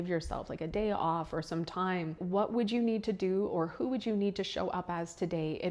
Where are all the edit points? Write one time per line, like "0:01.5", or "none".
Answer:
0:02.2